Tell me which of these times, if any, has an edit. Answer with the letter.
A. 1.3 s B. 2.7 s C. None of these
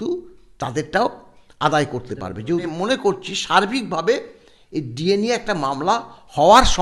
B